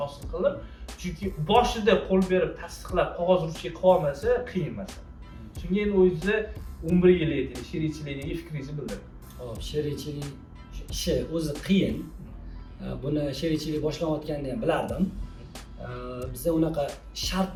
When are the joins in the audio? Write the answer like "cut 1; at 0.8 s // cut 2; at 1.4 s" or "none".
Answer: none